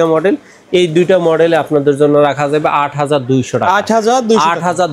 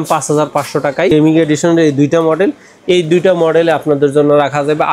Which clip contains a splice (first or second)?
second